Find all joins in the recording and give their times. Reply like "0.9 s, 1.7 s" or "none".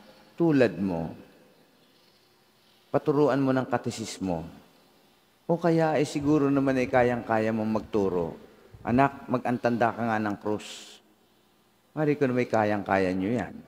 none